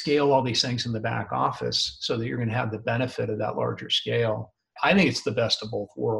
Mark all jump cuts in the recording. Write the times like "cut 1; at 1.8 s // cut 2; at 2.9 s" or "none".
cut 1; at 4.8 s